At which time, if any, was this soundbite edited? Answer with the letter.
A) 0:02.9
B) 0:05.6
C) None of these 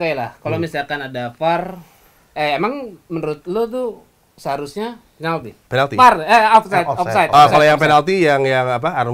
B